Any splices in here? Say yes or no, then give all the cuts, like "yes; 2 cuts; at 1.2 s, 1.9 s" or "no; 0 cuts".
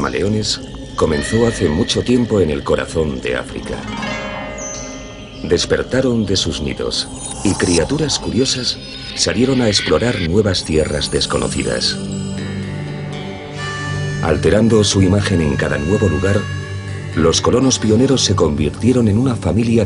yes; 1 cut; at 6.7 s